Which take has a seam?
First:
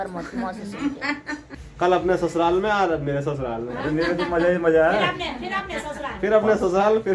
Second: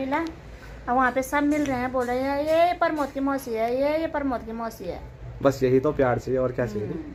first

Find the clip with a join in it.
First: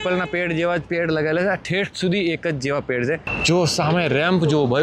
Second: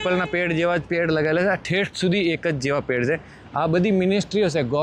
first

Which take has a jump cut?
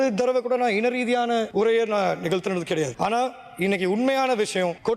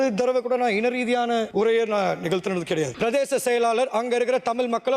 second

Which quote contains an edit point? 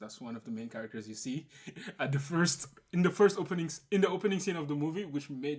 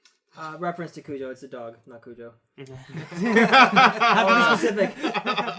first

